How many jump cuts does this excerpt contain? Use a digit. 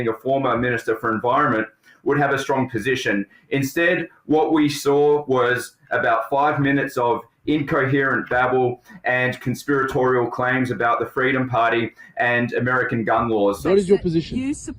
1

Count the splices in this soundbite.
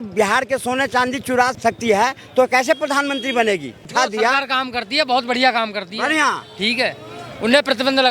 2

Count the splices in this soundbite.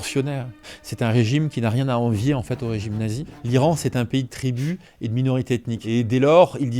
2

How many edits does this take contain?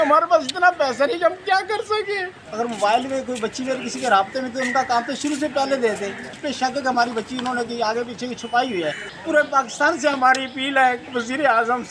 3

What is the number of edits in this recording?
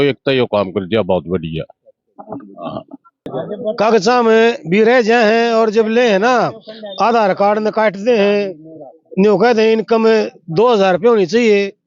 1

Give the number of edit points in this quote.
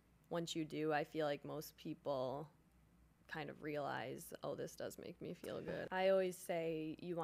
1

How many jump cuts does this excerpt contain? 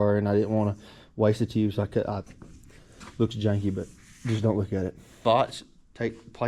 1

